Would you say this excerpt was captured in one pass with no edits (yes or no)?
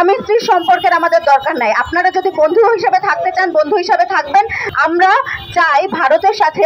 no